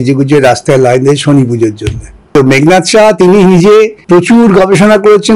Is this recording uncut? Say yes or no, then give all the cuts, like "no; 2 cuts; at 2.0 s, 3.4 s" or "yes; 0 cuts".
no; 2 cuts; at 2.3 s, 4.0 s